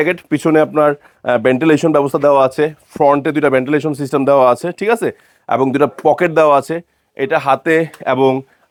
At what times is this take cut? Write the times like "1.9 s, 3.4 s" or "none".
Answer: none